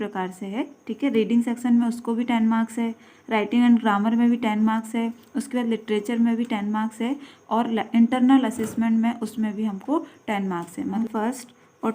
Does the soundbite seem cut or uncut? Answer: cut